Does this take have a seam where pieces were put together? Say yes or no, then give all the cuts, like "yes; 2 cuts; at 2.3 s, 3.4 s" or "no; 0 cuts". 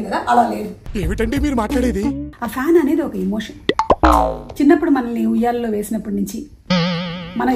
yes; 1 cut; at 2.3 s